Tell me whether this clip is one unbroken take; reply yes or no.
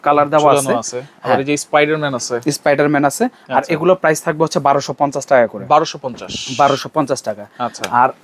yes